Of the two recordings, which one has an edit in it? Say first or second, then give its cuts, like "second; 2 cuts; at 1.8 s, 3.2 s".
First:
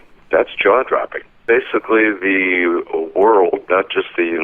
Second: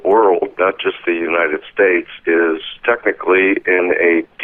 first; 1 cut; at 1.4 s